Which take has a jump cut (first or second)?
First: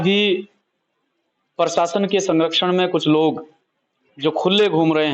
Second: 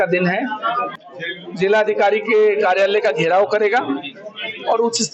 second